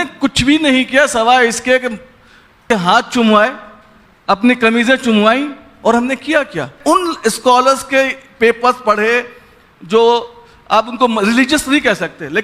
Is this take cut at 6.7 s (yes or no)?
yes